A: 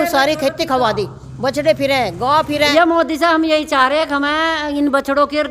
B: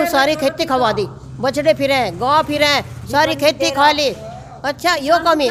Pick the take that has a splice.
A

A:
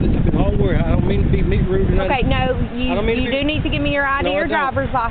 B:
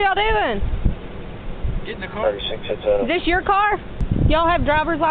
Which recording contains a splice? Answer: B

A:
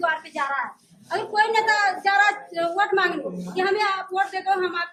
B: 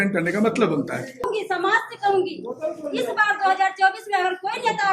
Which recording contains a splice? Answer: B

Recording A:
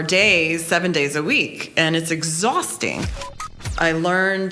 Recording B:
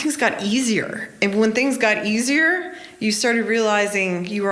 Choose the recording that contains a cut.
A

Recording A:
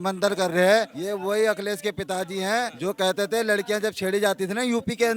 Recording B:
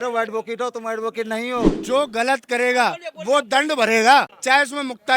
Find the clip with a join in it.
B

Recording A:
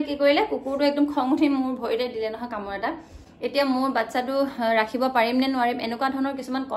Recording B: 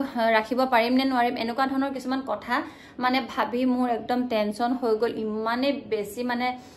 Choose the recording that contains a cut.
A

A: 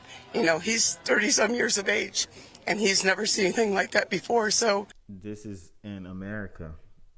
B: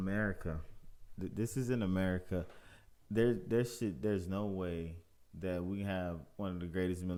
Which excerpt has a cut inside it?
A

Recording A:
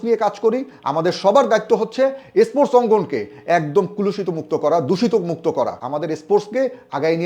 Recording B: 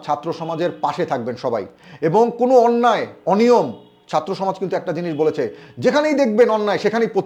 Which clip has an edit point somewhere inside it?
A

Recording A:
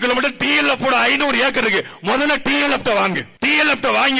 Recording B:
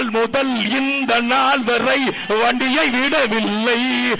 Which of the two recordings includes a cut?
A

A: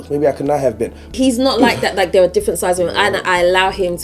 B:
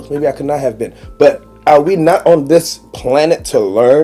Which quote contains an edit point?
A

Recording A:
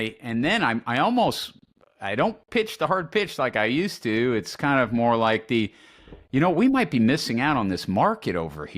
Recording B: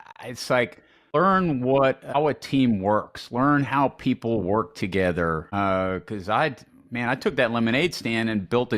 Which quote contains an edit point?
B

